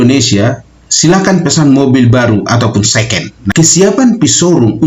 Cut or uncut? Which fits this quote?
cut